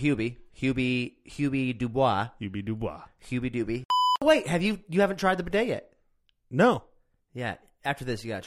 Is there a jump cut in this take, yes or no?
yes